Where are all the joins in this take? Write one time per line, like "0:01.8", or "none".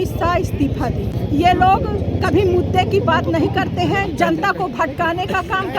0:01.2